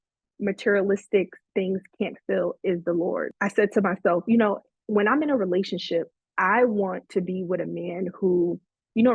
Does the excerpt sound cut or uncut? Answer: cut